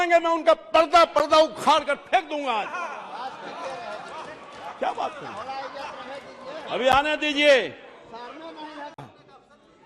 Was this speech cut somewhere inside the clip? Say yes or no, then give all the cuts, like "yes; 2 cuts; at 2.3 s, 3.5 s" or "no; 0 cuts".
no; 0 cuts